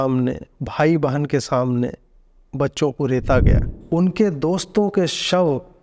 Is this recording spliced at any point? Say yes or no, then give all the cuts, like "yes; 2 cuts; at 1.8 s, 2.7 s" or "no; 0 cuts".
yes; 1 cut; at 3.7 s